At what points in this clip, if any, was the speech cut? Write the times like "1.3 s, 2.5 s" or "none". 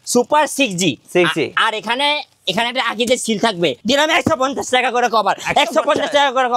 3.8 s